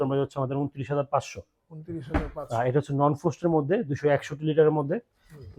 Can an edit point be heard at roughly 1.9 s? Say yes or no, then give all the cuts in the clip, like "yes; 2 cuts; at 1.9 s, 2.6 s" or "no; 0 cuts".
no; 0 cuts